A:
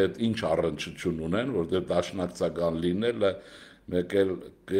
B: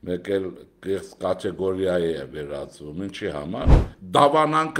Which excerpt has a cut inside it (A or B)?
B